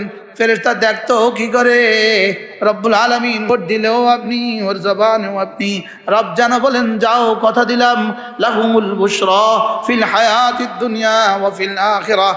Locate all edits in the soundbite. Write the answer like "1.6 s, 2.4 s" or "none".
2.4 s, 3.5 s

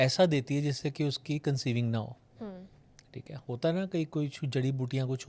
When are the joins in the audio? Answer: none

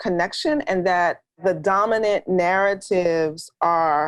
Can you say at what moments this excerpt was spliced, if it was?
1.4 s

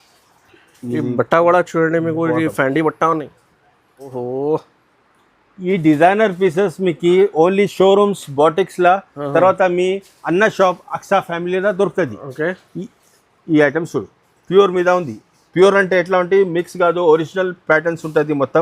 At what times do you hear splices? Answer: 4.1 s

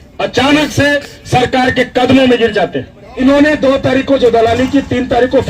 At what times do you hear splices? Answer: 3.2 s

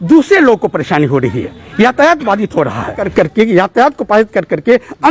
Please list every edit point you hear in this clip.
3.0 s

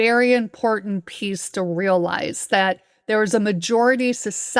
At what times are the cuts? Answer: none

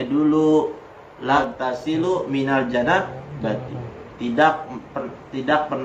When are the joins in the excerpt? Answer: 1.4 s

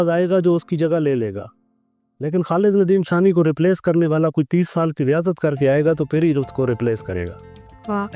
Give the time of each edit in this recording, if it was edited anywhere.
none

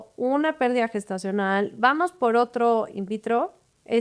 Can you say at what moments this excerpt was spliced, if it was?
none

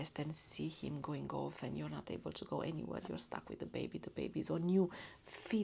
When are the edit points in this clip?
none

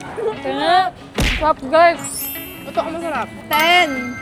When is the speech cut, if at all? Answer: none

